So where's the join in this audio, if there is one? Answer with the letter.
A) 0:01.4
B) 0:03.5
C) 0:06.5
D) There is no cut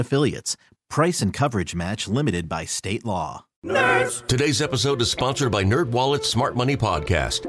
B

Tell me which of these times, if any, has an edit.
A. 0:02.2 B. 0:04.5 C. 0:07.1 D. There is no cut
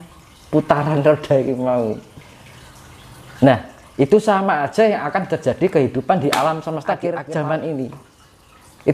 C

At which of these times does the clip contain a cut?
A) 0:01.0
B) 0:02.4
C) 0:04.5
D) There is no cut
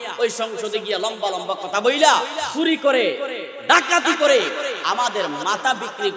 B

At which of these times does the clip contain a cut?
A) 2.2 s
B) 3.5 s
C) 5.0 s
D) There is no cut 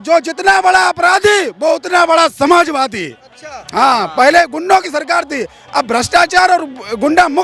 D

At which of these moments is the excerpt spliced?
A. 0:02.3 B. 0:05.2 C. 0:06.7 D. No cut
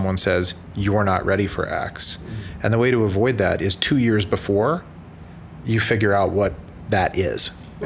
C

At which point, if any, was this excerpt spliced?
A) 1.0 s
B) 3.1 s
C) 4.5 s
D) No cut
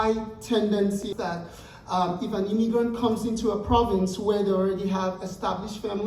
A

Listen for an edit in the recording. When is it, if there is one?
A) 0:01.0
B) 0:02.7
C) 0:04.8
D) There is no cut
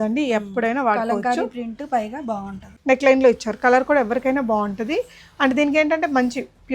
B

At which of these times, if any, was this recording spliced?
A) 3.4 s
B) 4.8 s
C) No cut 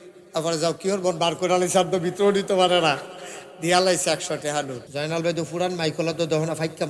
B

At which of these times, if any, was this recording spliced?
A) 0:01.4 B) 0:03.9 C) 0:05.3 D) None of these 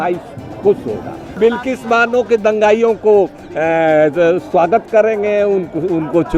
A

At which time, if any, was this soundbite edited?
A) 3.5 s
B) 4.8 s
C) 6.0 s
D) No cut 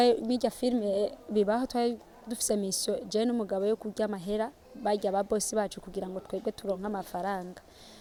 D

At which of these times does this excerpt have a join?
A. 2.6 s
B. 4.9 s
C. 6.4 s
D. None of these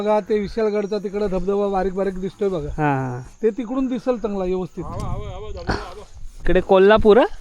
C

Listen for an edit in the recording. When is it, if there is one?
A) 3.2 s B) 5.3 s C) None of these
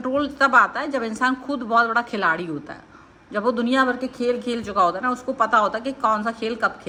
C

